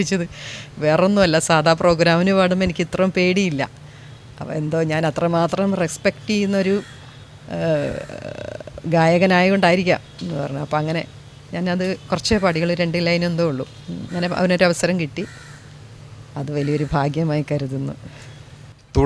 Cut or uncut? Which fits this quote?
uncut